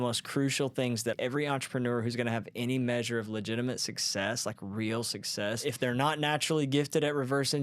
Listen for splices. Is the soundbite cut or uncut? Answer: cut